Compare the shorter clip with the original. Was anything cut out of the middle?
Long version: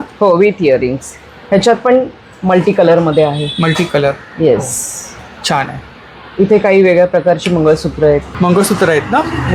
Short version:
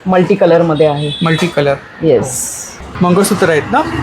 yes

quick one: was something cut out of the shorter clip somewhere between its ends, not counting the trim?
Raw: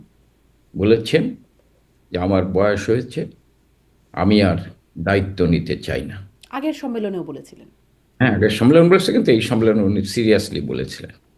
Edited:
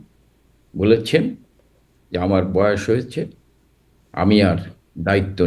no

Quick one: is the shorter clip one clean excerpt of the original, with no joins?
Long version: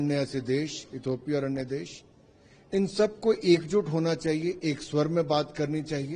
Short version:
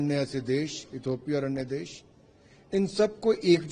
yes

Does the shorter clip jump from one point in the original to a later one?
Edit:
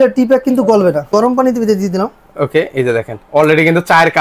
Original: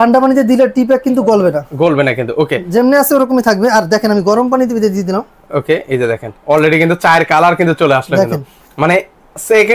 yes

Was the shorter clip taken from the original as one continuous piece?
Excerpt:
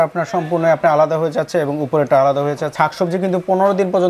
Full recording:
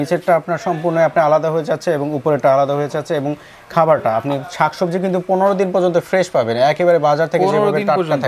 no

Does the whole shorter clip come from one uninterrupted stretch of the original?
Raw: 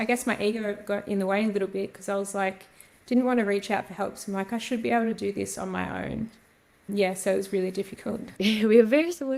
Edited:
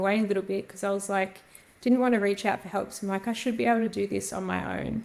yes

